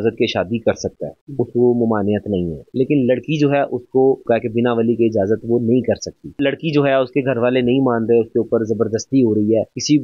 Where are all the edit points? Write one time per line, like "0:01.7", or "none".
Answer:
0:02.6
0:04.2
0:06.3